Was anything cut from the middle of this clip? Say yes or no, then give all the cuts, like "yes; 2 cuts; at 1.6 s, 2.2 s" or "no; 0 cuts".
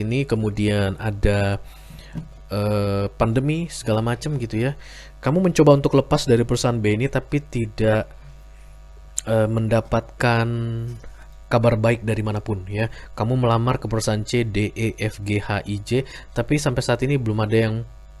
no; 0 cuts